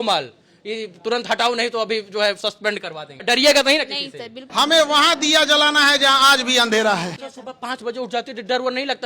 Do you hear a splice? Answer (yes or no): yes